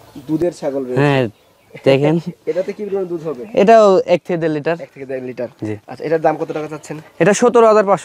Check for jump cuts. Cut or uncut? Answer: uncut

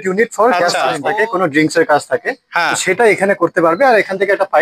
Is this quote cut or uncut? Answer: cut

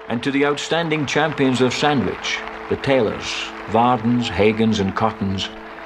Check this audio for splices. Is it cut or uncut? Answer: uncut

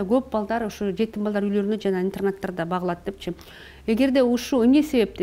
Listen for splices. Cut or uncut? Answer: uncut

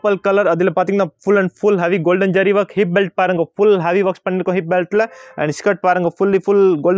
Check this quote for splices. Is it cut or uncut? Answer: uncut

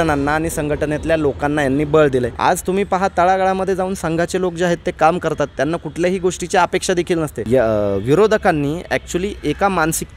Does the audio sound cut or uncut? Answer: cut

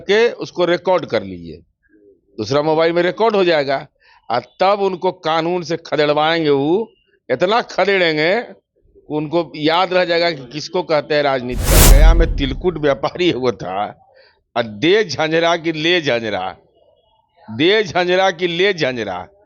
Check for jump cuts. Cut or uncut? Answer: cut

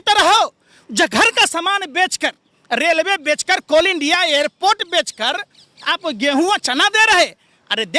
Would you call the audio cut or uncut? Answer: uncut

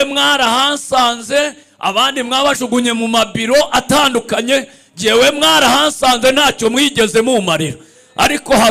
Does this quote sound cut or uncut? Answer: uncut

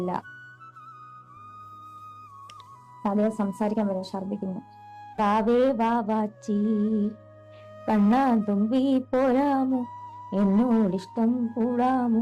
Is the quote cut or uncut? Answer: cut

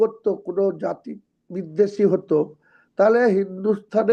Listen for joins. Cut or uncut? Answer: uncut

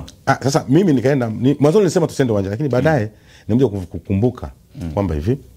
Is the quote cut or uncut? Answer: uncut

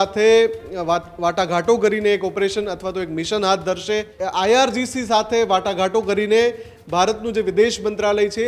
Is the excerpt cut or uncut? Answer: cut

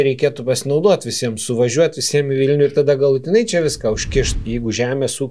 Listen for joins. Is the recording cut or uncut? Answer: cut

